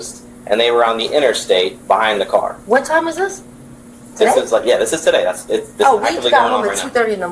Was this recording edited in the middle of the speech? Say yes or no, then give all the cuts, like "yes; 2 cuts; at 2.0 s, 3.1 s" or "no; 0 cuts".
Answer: no; 0 cuts